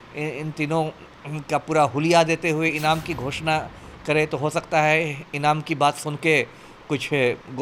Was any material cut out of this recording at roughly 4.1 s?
no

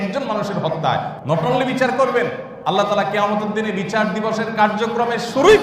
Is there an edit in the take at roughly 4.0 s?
no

